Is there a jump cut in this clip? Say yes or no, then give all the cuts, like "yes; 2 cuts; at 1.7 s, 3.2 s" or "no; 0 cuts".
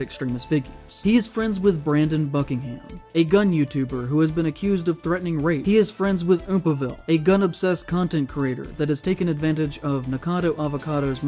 yes; 2 cuts; at 1.0 s, 5.6 s